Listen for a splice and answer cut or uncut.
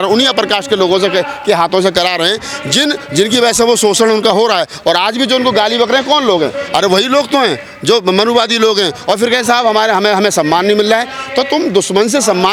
uncut